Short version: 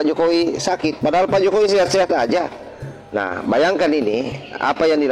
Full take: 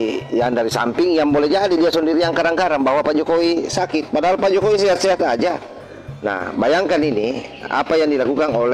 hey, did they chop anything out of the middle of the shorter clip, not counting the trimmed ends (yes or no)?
no